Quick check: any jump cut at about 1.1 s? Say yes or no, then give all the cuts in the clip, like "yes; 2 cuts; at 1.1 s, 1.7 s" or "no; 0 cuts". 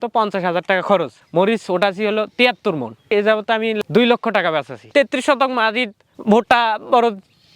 no; 1 cut; at 4.8 s